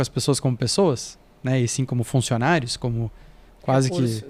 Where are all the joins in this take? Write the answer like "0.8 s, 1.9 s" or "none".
none